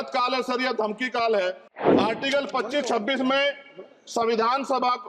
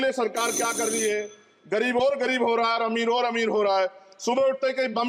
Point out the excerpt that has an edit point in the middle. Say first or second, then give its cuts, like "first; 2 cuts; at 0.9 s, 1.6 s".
first; 1 cut; at 1.7 s